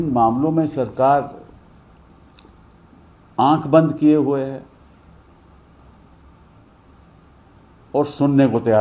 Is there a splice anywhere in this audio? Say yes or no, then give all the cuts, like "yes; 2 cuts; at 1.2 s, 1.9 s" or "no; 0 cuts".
no; 0 cuts